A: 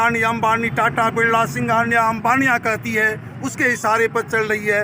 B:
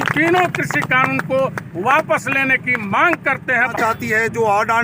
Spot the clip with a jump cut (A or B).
B